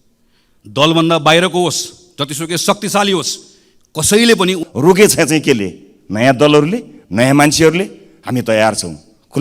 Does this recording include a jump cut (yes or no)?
yes